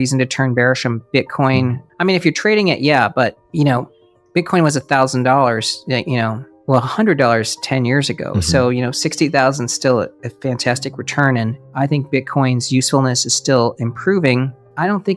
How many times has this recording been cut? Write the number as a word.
three